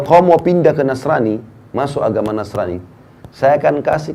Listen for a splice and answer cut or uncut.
uncut